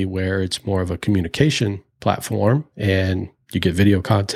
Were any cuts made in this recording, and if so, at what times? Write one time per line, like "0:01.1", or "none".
0:01.9